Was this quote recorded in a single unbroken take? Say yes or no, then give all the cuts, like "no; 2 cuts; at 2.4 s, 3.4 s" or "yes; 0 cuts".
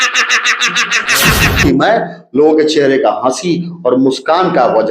no; 1 cut; at 1.6 s